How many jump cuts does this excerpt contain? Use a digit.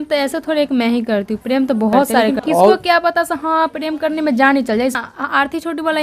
1